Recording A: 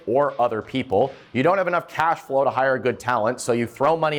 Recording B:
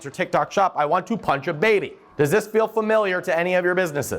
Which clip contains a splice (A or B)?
B